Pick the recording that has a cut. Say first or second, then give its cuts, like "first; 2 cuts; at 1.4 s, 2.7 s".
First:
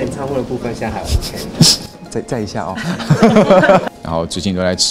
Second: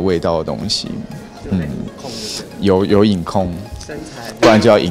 first; 1 cut; at 3.9 s